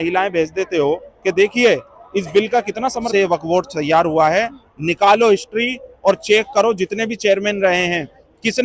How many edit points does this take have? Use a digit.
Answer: 1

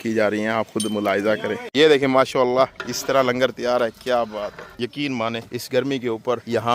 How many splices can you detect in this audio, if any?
2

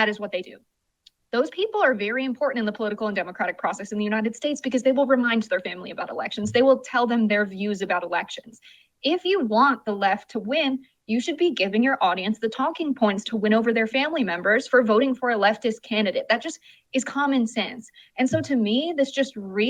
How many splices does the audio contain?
0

